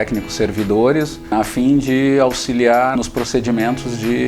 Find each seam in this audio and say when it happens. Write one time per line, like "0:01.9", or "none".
0:01.2
0:02.9